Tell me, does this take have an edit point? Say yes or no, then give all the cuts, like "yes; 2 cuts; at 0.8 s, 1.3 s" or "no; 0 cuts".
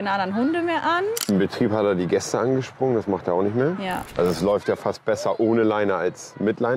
yes; 2 cuts; at 1.2 s, 4.1 s